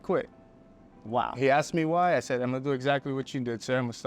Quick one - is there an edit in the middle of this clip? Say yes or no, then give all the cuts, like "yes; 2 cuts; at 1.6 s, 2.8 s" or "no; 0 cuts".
no; 0 cuts